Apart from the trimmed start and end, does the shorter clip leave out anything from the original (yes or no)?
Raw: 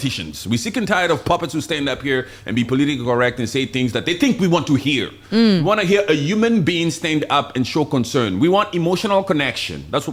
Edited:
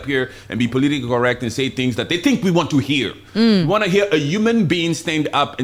no